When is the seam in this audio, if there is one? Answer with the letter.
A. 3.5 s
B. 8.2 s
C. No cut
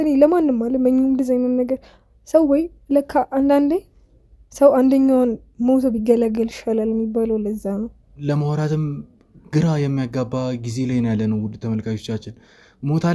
B